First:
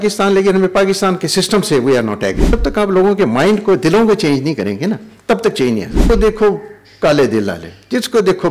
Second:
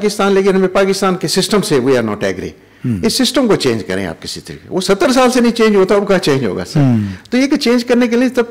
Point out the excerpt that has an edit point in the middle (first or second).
first